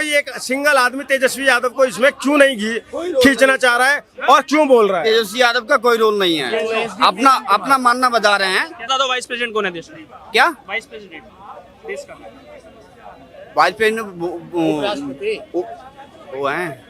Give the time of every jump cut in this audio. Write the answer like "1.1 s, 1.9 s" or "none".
8.9 s